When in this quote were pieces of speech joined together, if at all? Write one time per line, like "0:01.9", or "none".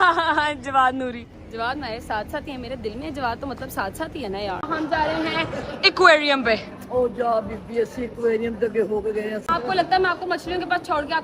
0:01.4
0:04.7
0:09.5